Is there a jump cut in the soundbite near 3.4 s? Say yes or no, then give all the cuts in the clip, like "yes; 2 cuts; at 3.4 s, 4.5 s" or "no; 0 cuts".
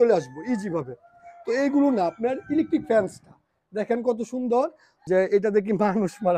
no; 1 cut; at 4.9 s